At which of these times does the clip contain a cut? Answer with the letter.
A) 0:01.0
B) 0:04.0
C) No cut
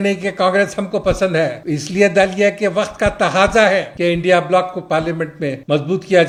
C